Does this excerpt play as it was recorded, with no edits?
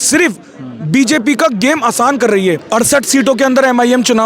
no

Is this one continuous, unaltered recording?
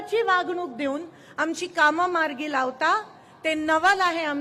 yes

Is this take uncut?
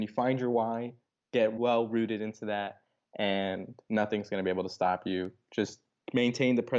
yes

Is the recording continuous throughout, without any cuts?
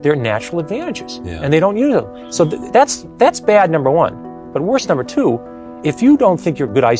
yes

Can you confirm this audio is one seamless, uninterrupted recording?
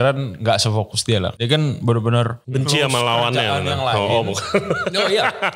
no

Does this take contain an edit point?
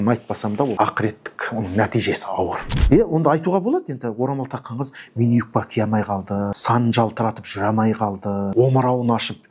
yes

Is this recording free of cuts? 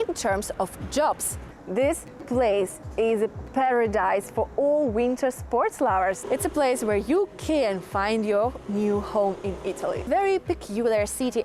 no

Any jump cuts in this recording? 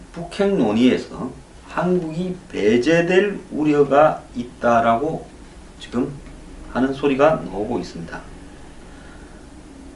no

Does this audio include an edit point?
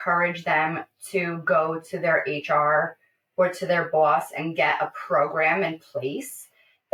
no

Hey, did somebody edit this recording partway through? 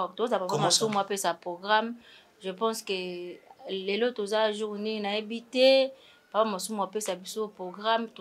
no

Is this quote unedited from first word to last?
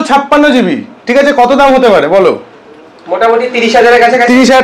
yes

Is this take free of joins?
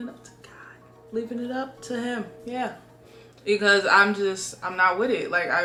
yes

